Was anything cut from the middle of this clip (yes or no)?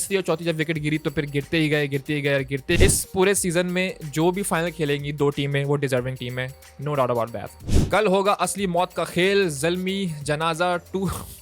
yes